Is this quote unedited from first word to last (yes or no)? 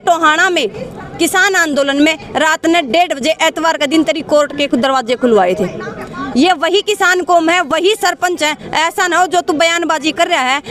yes